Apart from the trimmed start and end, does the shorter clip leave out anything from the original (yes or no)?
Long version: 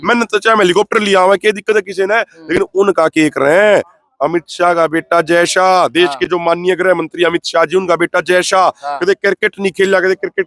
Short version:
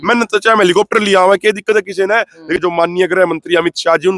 yes